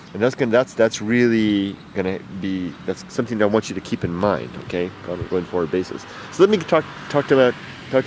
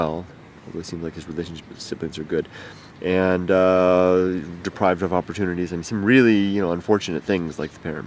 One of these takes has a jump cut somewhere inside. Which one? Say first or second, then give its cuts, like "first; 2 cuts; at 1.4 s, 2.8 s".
second; 1 cut; at 5.5 s